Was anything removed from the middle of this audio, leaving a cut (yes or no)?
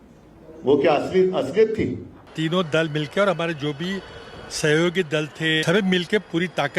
yes